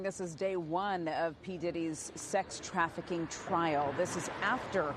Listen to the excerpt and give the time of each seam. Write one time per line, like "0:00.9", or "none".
0:03.9